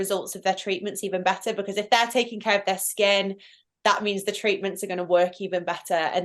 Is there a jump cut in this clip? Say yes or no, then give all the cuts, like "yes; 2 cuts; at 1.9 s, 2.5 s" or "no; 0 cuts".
no; 0 cuts